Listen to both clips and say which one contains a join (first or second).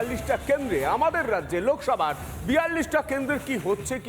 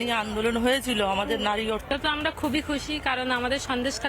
second